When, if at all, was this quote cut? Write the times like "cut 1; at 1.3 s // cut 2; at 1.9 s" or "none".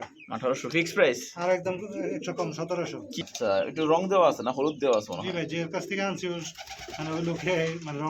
cut 1; at 3.3 s